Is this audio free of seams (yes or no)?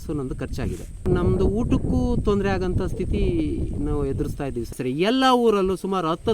no